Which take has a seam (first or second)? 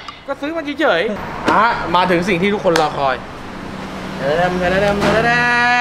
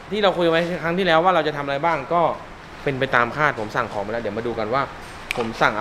first